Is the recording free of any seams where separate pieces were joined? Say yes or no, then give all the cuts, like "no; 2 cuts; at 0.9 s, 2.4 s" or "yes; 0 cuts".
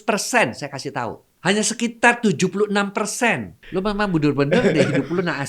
no; 2 cuts; at 1.2 s, 3.5 s